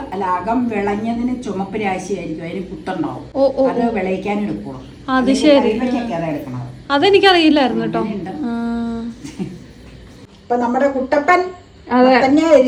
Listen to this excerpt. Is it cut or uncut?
uncut